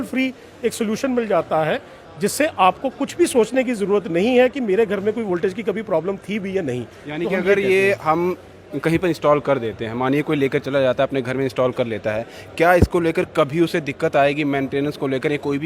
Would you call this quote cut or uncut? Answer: uncut